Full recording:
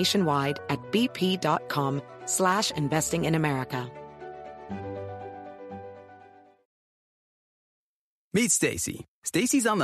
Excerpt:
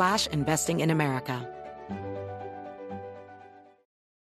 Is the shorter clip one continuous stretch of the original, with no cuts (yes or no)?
no